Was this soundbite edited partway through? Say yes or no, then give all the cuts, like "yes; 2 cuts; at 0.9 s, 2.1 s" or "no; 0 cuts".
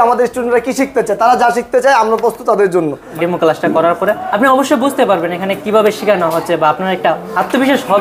yes; 2 cuts; at 3.0 s, 4.3 s